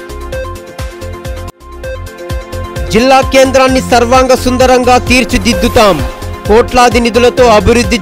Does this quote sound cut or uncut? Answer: cut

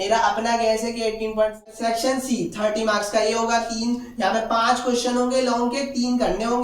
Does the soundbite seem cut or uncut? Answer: cut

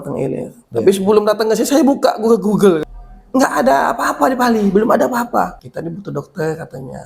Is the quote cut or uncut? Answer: cut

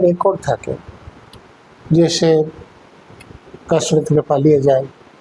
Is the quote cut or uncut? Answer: uncut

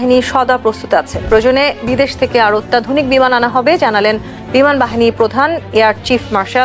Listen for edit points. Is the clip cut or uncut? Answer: uncut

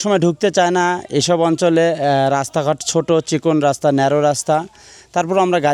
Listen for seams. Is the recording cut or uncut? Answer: uncut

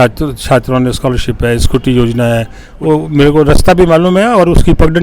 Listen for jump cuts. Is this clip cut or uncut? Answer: cut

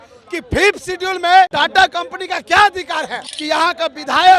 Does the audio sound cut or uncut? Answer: cut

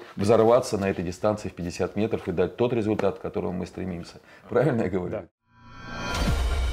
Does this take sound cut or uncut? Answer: cut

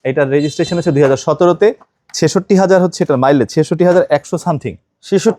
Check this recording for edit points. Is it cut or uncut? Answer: uncut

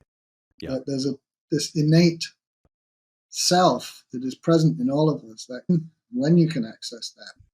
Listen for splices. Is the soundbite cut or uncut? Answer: cut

